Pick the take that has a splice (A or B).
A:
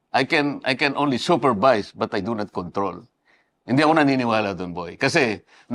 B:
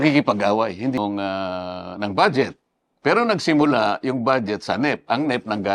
B